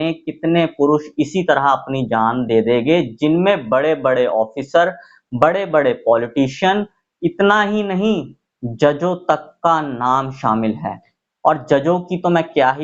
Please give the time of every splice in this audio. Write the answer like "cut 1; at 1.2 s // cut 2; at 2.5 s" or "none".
none